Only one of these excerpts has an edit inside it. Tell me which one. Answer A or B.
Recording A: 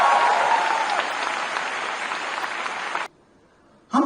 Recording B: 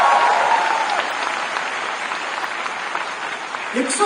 A